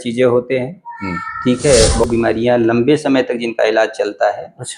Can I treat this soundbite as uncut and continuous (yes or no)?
no